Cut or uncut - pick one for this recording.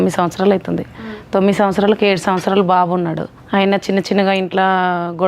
cut